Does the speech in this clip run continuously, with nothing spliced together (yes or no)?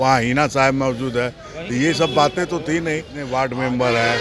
no